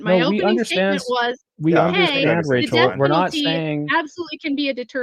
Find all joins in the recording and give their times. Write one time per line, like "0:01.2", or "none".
none